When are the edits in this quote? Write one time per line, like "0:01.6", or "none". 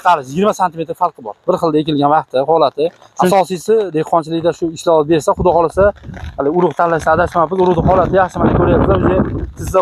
0:03.1